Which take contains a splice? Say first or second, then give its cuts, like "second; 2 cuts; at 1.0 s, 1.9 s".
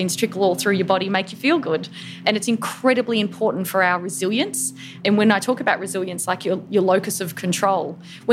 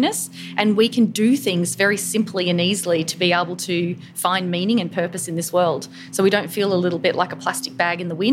first; 2 cuts; at 2.2 s, 4.9 s